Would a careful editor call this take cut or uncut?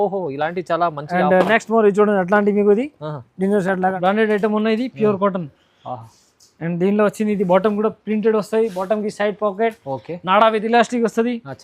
cut